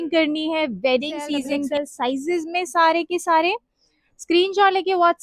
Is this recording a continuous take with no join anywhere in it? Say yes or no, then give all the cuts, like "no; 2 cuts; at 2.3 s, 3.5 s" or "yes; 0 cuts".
no; 1 cut; at 1.7 s